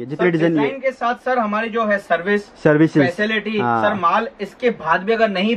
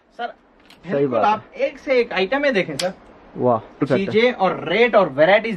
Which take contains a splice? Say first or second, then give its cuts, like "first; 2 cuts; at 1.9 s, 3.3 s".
second; 1 cut; at 3.9 s